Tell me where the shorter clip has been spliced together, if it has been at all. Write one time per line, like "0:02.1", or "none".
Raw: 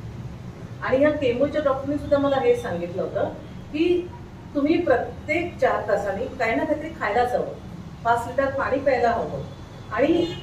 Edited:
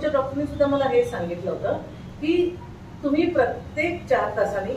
none

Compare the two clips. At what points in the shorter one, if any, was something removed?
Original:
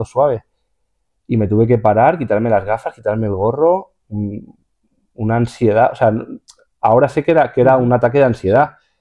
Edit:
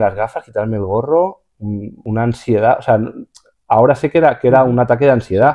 0:01.9

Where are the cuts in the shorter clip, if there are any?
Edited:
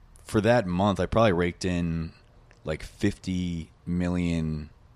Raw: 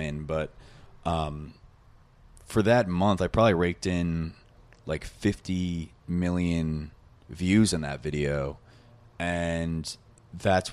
none

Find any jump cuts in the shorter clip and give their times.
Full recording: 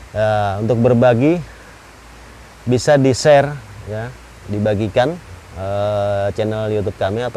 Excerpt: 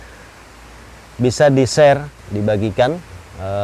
0:02.2

